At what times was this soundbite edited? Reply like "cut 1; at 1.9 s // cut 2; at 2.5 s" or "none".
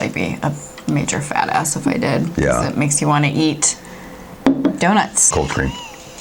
cut 1; at 5.3 s